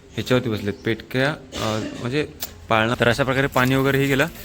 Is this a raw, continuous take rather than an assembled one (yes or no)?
no